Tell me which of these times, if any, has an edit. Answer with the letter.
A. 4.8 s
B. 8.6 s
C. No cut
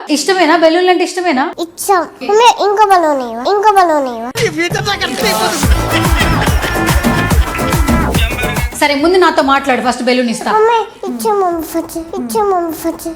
B